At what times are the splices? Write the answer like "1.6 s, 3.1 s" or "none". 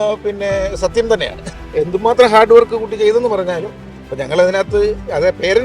1.5 s